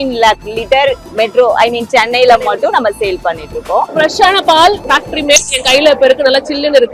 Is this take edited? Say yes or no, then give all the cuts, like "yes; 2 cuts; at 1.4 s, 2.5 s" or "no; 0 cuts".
yes; 3 cuts; at 1.0 s, 3.9 s, 4.8 s